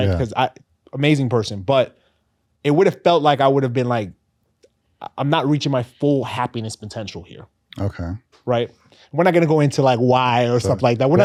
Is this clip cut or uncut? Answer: uncut